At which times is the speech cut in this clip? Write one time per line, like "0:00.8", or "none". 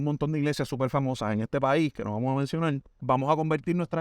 0:02.9